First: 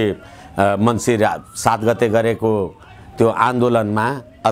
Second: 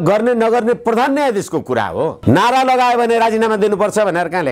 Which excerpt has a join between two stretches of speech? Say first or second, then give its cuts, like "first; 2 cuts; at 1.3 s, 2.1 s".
second; 1 cut; at 2.2 s